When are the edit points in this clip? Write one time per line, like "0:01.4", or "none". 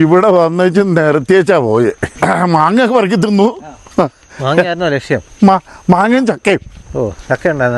0:02.1